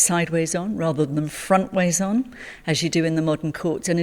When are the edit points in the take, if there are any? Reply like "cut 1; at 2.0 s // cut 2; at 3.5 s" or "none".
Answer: none